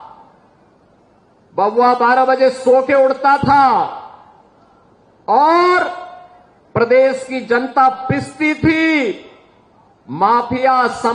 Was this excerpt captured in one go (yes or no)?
yes